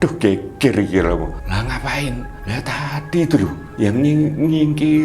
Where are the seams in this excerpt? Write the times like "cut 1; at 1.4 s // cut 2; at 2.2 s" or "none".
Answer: cut 1; at 1.4 s // cut 2; at 2.3 s // cut 3; at 3.6 s